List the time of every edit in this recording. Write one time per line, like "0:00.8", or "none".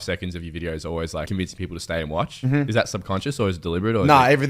0:01.3
0:02.7